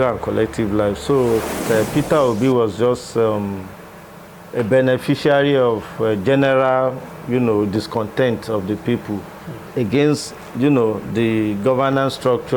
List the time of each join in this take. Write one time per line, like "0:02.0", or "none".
0:01.6